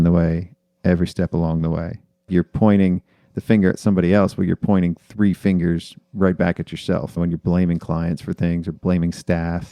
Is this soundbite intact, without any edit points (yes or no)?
no